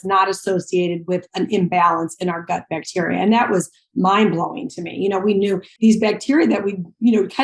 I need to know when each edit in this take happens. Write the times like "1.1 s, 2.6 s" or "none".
5.7 s